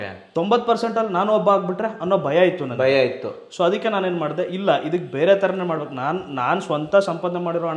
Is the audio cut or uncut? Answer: uncut